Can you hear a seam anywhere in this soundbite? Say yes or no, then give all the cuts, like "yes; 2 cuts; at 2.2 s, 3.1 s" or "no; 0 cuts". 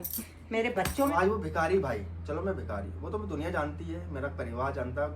yes; 1 cut; at 1.1 s